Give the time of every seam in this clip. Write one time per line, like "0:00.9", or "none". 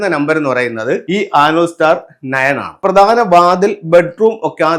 0:01.0
0:02.8